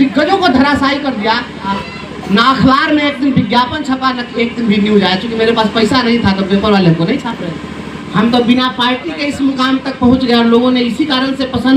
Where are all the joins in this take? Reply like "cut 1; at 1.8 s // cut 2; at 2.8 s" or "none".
cut 1; at 1.8 s // cut 2; at 8.0 s